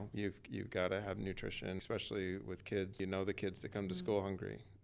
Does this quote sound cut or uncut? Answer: cut